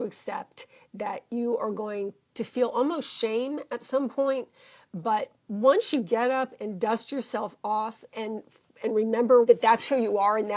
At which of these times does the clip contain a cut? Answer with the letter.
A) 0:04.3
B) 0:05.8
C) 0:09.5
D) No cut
C